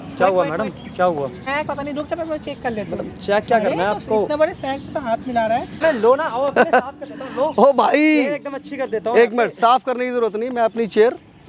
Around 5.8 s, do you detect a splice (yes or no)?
yes